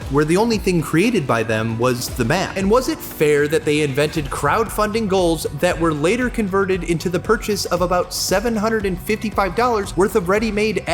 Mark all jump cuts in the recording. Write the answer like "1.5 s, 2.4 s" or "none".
2.5 s, 9.9 s